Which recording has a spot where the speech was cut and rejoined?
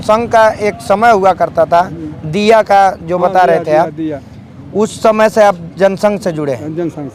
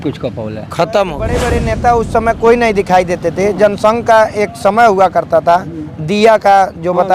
second; 1 cut; at 1.5 s

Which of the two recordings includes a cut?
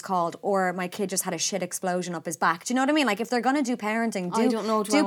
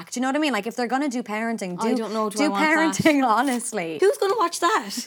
second; 1 cut; at 3.9 s

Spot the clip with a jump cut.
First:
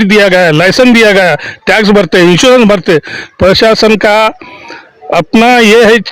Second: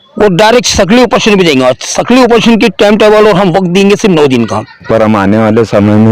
second; 1 cut; at 4.9 s

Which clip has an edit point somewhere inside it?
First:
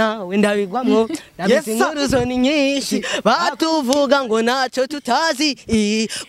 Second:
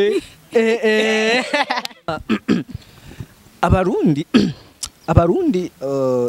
second; 1 cut; at 2.2 s

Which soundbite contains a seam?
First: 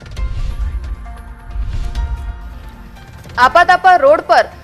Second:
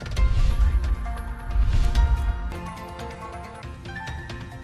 second; 1 cut; at 2.4 s

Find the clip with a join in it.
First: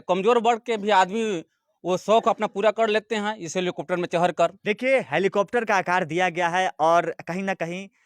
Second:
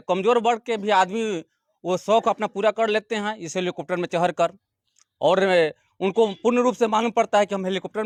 first; 1 cut; at 4.6 s

